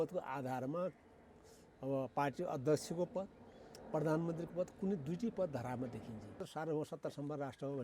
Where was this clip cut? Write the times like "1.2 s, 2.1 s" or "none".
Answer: 6.5 s